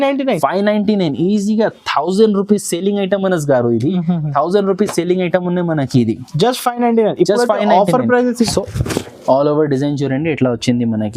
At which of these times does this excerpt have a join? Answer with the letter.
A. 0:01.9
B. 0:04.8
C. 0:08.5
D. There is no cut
C